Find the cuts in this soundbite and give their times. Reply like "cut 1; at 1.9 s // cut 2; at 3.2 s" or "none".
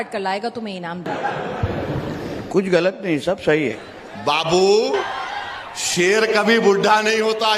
cut 1; at 1.1 s // cut 2; at 3.8 s // cut 3; at 5.1 s